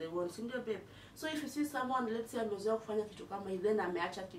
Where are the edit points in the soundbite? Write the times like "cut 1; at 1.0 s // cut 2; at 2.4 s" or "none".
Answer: none